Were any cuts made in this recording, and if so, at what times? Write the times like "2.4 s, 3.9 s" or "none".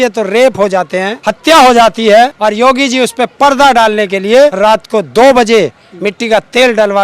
1.1 s, 2.3 s, 4.5 s